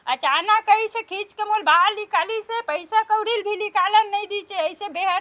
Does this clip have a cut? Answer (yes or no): no